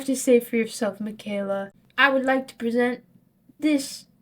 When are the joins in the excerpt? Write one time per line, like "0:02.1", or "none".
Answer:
0:01.8